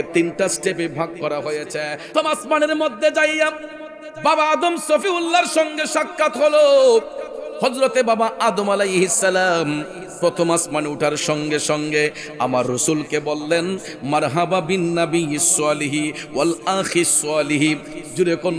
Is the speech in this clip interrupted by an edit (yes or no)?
yes